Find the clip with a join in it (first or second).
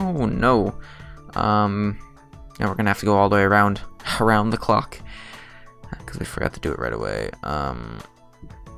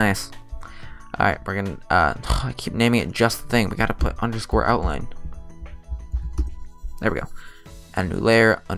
first